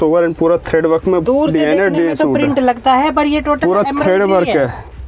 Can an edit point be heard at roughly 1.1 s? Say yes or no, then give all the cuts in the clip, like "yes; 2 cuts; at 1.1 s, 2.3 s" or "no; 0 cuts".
no; 0 cuts